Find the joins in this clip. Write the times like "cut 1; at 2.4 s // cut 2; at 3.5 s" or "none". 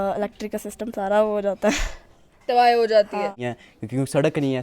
cut 1; at 3.4 s